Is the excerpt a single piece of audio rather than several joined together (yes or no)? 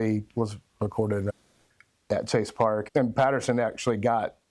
no